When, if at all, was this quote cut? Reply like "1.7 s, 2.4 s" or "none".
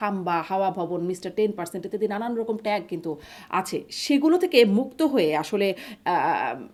none